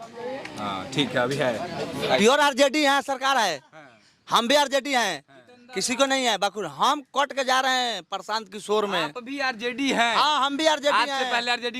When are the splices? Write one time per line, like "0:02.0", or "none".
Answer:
0:02.2